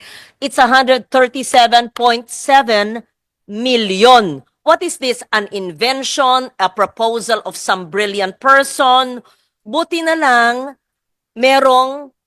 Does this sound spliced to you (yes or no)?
no